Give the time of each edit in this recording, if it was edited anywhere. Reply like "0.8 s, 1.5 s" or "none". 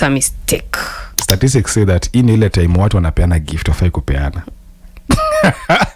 1.2 s